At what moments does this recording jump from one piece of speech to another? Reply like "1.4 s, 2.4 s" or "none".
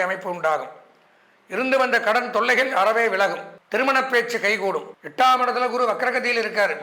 3.5 s, 4.9 s